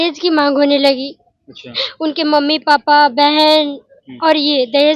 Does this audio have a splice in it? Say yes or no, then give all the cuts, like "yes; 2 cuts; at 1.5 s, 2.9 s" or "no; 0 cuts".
no; 0 cuts